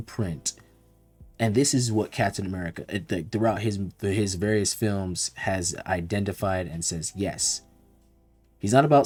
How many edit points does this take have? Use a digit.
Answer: 0